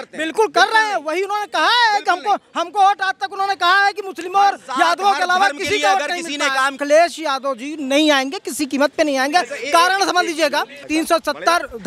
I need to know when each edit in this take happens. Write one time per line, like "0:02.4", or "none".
0:06.8
0:10.9